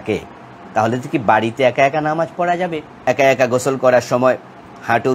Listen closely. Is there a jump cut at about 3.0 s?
yes; 1 cut; at 3.0 s

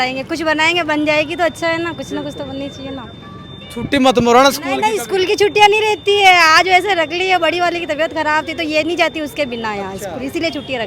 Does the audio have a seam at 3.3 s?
no; 0 cuts

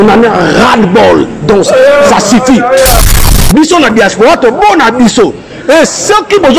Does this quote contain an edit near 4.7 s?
no; 1 cut; at 3.2 s

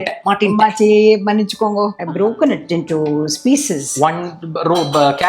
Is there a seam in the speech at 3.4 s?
no; 1 cut; at 2.0 s

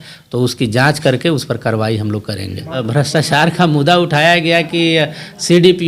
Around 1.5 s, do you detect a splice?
no; 1 cut; at 2.8 s

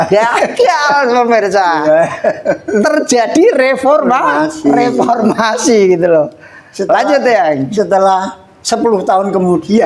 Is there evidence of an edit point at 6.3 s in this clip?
no; 0 cuts

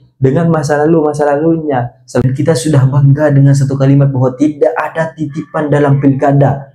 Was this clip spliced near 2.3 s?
yes; 1 cut; at 2.3 s

